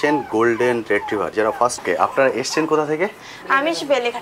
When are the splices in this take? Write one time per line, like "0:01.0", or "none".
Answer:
0:01.8